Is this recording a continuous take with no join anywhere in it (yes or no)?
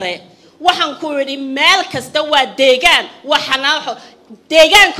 yes